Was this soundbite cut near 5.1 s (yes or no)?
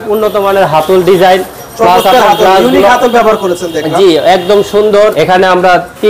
yes